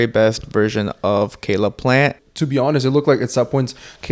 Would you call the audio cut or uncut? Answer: cut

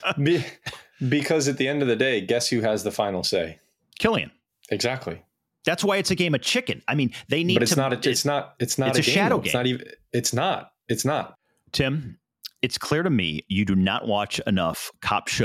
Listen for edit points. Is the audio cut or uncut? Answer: cut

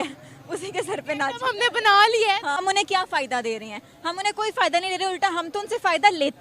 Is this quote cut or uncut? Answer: cut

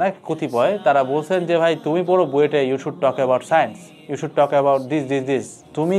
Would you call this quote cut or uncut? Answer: uncut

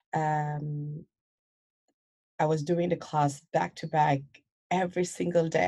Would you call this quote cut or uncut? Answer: uncut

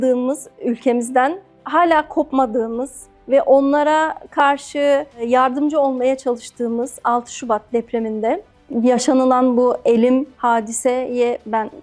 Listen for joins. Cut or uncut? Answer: uncut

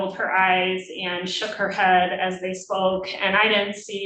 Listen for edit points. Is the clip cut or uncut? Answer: uncut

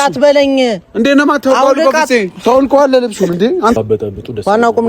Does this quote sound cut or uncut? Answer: cut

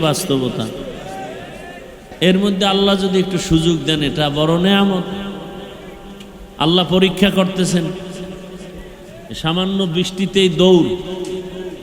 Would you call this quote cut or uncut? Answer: cut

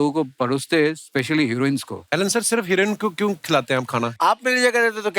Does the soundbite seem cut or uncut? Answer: cut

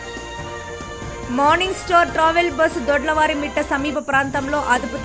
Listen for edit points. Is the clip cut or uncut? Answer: cut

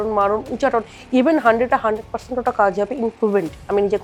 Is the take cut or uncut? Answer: uncut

